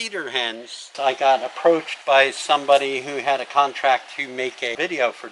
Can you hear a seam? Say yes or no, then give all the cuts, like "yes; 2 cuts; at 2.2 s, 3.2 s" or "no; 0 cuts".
yes; 2 cuts; at 0.9 s, 1.9 s